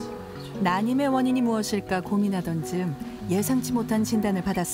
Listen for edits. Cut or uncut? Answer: uncut